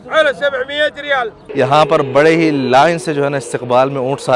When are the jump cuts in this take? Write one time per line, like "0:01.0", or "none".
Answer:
0:01.4